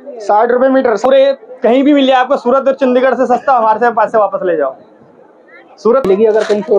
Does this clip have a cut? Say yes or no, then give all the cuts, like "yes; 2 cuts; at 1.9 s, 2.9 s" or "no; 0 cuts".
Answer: yes; 2 cuts; at 1.1 s, 6.0 s